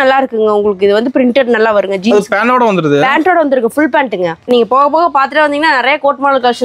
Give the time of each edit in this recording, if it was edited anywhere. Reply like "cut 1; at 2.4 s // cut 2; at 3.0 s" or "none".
cut 1; at 4.4 s